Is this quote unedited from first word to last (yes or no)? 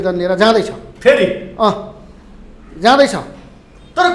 yes